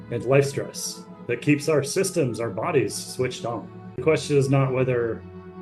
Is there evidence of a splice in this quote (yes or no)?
yes